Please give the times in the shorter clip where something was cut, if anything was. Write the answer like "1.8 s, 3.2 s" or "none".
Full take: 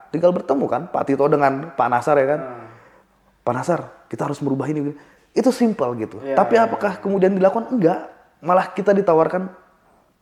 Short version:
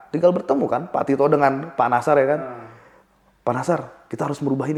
none